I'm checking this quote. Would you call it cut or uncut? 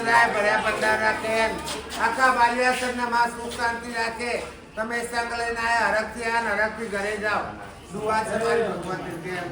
uncut